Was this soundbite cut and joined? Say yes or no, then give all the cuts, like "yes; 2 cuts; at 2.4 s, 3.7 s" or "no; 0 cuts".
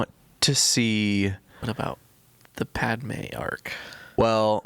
no; 0 cuts